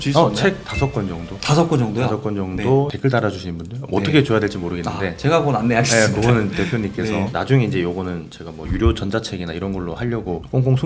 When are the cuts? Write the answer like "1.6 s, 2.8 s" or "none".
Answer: none

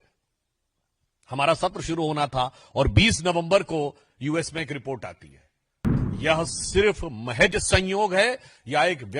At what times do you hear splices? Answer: 5.9 s

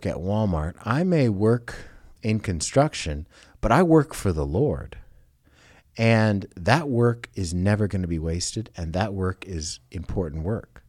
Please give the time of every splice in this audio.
2.1 s

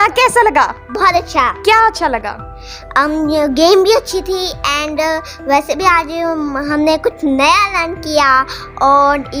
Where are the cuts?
none

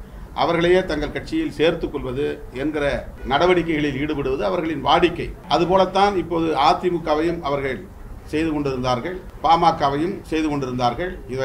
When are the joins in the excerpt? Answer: 3.1 s, 5.3 s, 9.3 s, 10.2 s

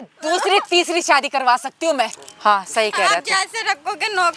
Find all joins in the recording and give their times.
2.2 s

